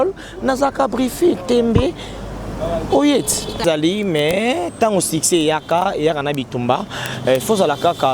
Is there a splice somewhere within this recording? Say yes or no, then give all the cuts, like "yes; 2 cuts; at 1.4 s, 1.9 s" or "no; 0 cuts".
yes; 1 cut; at 3.6 s